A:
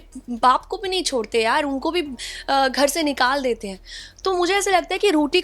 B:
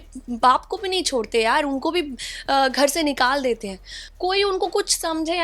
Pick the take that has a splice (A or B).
B